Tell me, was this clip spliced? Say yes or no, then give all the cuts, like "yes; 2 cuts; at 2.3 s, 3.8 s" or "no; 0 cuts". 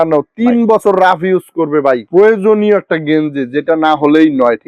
yes; 1 cut; at 2.1 s